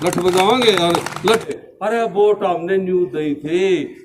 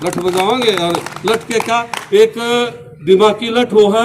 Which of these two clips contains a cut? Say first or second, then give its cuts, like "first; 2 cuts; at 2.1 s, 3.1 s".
first; 1 cut; at 1.5 s